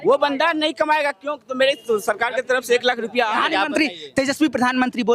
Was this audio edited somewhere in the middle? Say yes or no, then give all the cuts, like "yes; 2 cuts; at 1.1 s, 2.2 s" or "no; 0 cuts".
yes; 1 cut; at 3.3 s